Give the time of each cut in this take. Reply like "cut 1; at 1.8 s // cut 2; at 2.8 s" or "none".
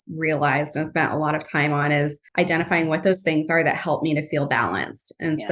cut 1; at 2.2 s